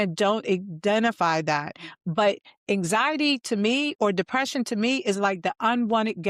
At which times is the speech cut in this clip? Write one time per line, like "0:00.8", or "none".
none